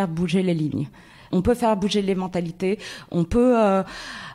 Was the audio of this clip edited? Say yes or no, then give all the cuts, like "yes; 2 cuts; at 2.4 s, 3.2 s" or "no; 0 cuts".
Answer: yes; 1 cut; at 1.2 s